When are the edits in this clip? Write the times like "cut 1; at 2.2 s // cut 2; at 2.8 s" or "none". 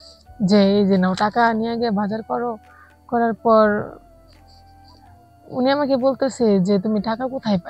cut 1; at 4.0 s // cut 2; at 5.4 s

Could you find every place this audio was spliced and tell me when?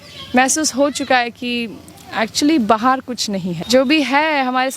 cut 1; at 3.6 s

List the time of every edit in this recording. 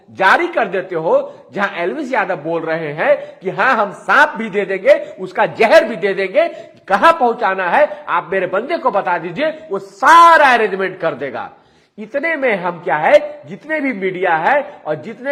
none

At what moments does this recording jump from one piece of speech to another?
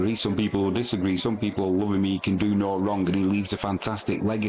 none

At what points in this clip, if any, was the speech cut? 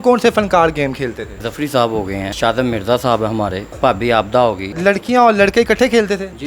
cut 1; at 1.4 s // cut 2; at 2.3 s // cut 3; at 3.7 s // cut 4; at 4.7 s

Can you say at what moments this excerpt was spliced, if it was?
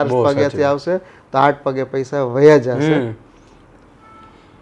none

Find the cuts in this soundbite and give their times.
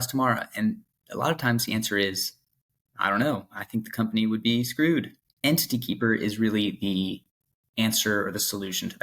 cut 1; at 5.2 s

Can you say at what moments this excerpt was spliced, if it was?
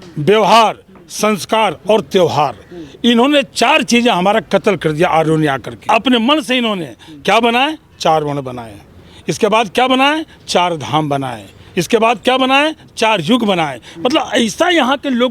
cut 1; at 5.9 s

